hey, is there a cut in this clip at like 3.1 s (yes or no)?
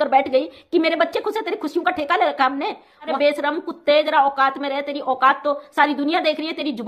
yes